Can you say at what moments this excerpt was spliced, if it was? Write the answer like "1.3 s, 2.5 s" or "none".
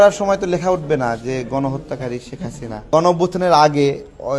2.9 s